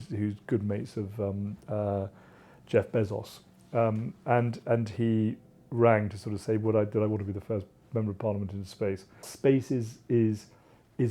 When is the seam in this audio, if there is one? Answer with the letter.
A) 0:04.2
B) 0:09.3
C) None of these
B